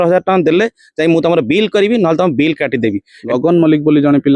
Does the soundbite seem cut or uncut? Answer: cut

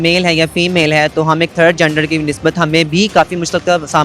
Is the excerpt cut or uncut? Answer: uncut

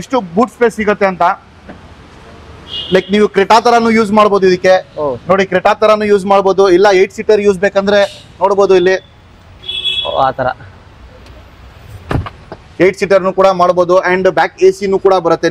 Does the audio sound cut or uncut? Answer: uncut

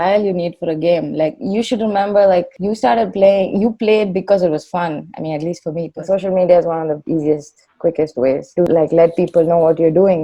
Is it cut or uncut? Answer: cut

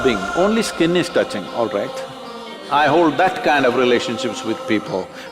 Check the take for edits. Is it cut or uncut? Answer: cut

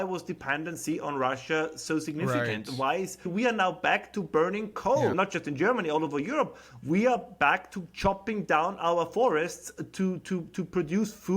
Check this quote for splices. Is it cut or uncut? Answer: cut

